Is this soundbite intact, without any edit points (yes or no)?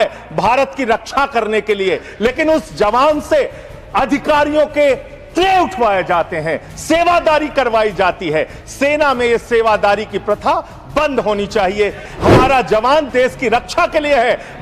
no